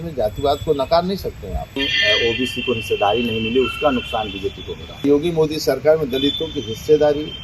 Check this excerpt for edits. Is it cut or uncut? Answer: cut